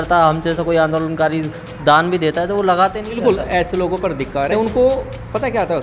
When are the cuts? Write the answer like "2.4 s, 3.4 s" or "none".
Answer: 3.2 s, 4.5 s